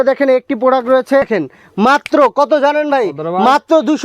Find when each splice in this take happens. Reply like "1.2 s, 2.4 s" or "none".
1.3 s